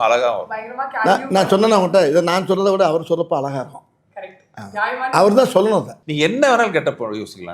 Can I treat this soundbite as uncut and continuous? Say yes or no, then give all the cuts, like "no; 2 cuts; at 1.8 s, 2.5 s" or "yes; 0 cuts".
no; 1 cut; at 6.0 s